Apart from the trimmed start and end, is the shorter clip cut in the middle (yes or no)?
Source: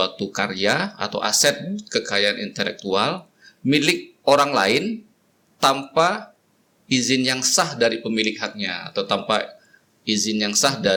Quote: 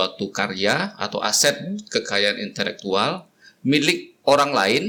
no